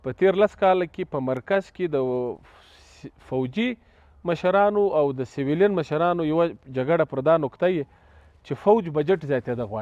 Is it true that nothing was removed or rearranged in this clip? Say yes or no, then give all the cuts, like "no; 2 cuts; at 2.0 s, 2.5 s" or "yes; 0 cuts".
yes; 0 cuts